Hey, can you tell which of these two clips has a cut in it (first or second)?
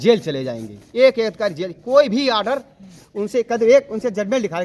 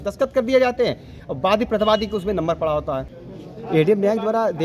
second